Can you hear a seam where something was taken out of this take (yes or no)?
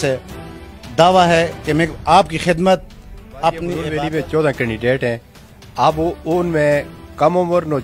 yes